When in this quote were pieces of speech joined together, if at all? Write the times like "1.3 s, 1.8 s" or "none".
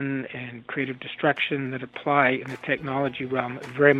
none